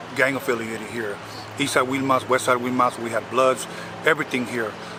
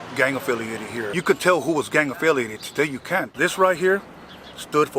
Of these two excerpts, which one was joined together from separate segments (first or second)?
second